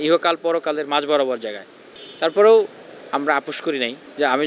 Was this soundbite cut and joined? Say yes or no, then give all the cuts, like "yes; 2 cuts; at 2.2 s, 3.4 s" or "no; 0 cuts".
no; 0 cuts